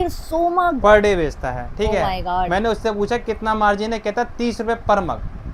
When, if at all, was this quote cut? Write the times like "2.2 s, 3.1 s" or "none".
none

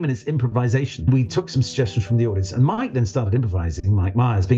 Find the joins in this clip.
1.1 s

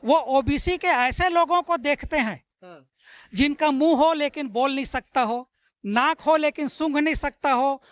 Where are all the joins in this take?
none

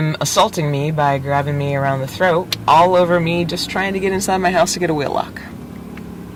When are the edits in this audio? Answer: none

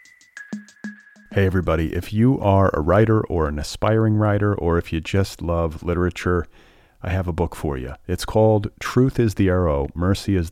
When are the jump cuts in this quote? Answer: 0.9 s

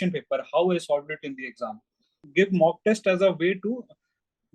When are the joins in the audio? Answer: 2.2 s

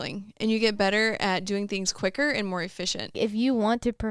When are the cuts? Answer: 3.2 s

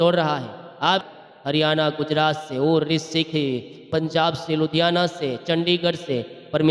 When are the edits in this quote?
1.0 s, 3.9 s

